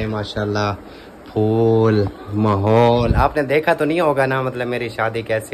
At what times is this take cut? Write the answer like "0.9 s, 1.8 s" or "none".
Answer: none